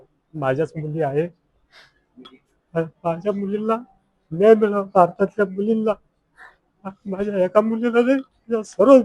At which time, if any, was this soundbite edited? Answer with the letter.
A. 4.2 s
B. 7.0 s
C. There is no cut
C